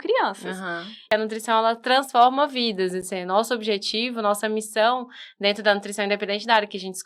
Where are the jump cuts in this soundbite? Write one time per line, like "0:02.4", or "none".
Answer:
0:01.0